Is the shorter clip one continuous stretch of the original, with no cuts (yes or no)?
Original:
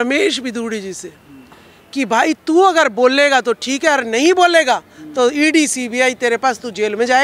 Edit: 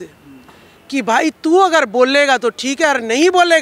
yes